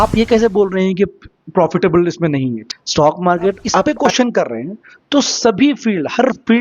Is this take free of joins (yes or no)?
no